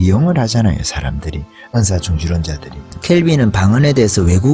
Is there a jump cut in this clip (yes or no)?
no